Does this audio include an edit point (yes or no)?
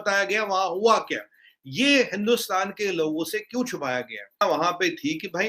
yes